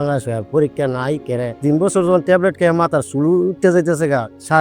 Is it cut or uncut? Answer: uncut